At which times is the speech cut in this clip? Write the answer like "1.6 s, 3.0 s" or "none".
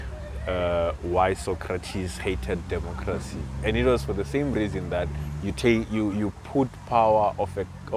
none